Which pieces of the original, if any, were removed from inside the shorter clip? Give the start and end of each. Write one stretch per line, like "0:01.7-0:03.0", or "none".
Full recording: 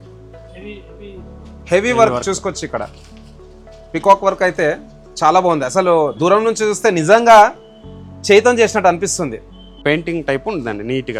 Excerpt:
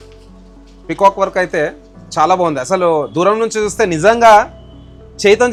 none